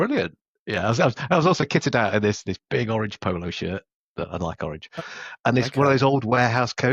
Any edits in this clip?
yes; 1 cut; at 4.0 s

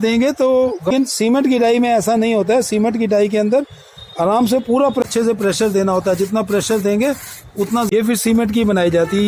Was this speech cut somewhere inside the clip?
yes; 3 cuts; at 0.9 s, 5.0 s, 7.9 s

